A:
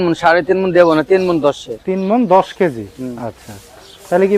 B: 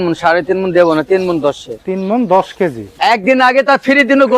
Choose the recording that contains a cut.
B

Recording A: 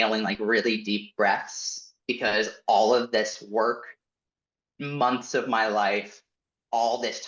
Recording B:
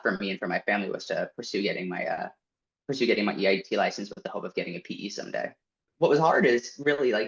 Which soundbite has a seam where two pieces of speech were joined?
B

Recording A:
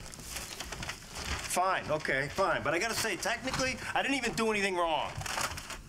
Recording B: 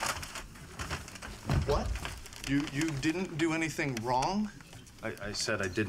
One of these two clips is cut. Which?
A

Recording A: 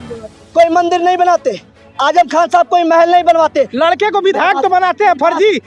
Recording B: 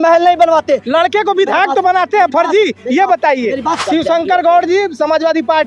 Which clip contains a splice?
B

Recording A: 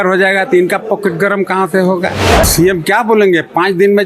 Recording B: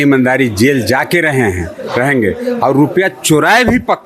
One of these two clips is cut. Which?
A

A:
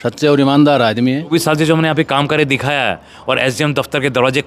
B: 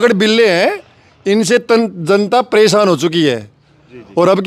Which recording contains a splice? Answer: A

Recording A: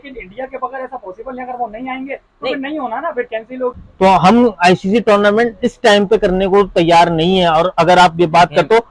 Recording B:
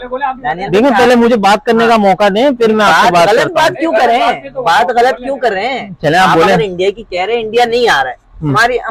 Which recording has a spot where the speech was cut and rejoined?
A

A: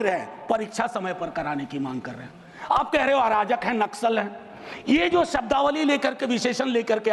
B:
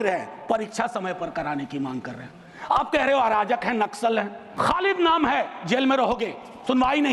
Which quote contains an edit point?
B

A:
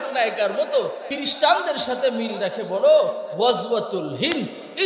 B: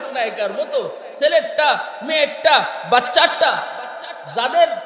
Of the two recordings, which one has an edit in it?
A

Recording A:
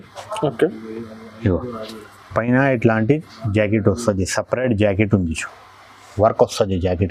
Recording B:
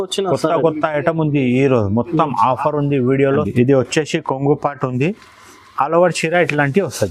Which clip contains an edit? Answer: B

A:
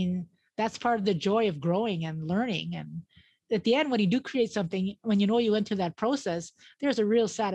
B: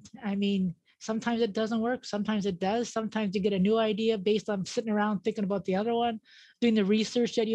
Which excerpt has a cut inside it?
A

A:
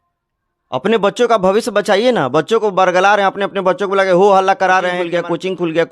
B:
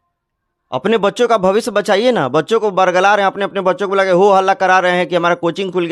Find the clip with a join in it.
A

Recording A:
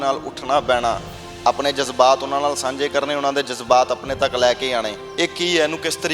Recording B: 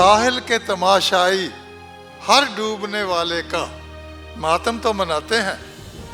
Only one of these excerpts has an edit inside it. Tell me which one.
A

